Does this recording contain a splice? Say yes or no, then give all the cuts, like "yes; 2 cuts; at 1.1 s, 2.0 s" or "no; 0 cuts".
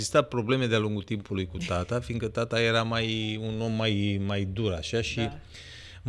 no; 0 cuts